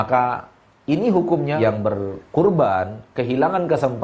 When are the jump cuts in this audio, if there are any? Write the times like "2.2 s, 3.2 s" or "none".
1.6 s